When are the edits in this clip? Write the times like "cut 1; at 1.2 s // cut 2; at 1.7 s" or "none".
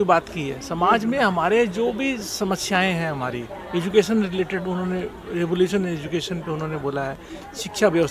none